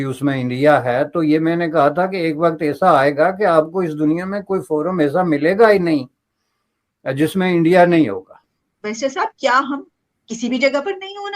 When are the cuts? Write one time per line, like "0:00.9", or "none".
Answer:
0:08.5

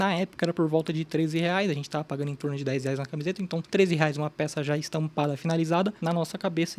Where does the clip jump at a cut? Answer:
0:03.6

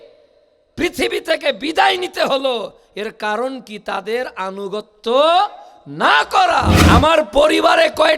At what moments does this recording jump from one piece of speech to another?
0:06.8

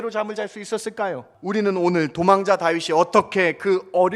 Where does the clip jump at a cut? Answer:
0:01.3

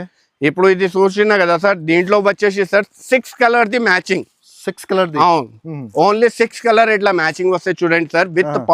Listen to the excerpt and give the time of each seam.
none

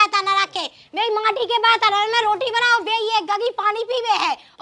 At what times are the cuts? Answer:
none

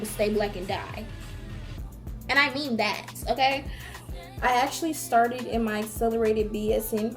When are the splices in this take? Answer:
0:04.0

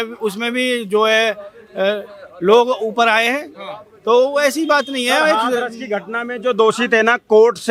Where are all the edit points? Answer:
none

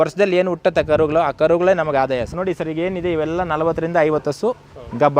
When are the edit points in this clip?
0:02.3

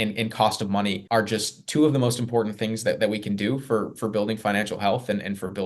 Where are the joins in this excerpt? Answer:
0:01.0

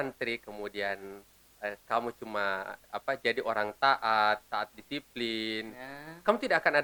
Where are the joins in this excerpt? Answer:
none

